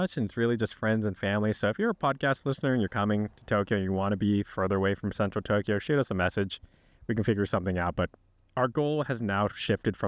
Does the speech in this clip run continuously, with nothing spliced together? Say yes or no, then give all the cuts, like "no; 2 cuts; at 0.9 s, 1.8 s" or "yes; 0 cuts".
yes; 0 cuts